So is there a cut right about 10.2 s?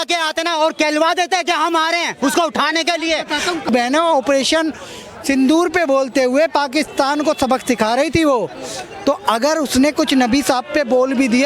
no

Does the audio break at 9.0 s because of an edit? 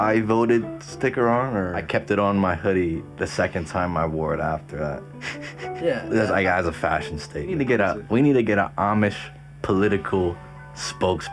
no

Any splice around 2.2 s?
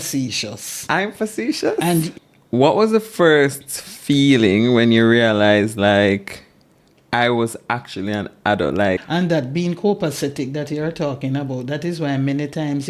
yes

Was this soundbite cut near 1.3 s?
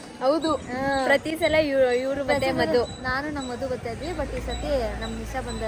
no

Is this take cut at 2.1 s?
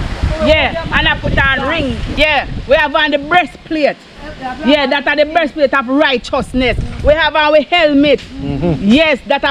yes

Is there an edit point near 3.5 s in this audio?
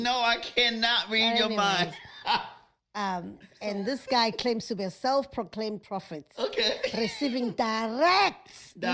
yes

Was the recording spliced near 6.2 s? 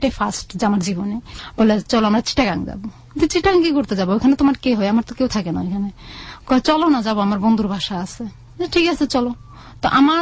no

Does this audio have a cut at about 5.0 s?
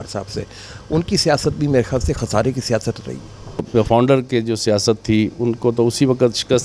no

